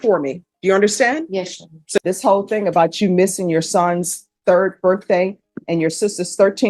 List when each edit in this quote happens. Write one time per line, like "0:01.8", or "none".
0:02.0